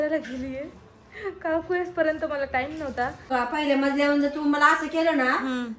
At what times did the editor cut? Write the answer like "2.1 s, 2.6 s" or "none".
3.3 s